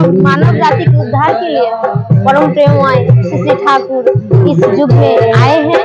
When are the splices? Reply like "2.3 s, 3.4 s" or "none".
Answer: none